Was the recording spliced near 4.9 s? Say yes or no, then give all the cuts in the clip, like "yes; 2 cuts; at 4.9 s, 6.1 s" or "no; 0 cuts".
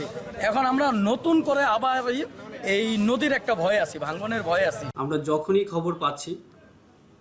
yes; 1 cut; at 4.9 s